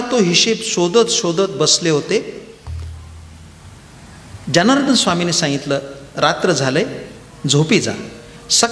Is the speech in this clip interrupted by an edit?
no; 0 cuts

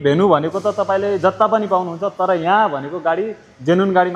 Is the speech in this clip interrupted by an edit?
no; 0 cuts

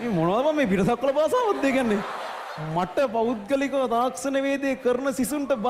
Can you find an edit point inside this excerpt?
no; 0 cuts

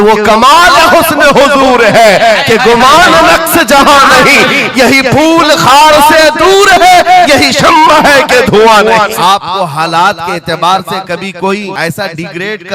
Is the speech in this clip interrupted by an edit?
yes; 2 cuts; at 9.1 s, 11.7 s

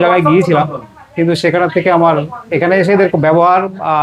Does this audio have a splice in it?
no; 0 cuts

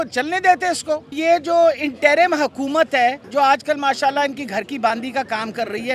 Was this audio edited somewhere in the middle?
yes; 2 cuts; at 1.1 s, 3.2 s

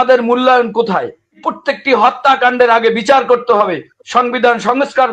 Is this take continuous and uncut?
no; 1 cut; at 1.5 s

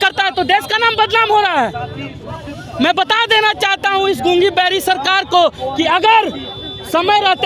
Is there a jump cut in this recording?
no; 0 cuts

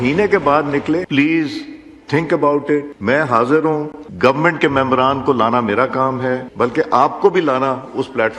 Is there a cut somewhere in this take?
yes; 4 cuts; at 1.1 s, 2.9 s, 4.0 s, 6.5 s

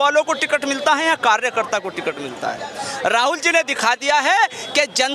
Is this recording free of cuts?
yes; 0 cuts

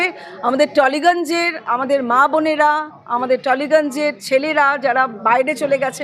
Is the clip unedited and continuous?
yes; 0 cuts

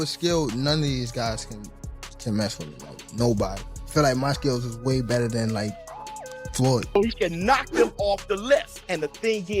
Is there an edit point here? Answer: yes; 1 cut; at 7.0 s

